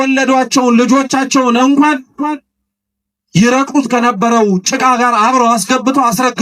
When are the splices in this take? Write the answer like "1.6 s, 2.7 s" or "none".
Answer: none